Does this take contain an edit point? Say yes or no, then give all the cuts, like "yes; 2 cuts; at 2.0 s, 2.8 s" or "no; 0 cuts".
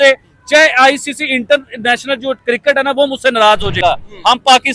yes; 1 cut; at 3.7 s